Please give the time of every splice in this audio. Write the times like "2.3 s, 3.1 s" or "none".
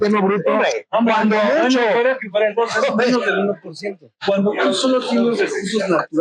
4.4 s